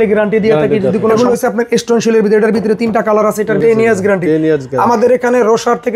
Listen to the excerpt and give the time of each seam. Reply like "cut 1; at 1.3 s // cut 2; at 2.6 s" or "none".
cut 1; at 1.1 s // cut 2; at 3.6 s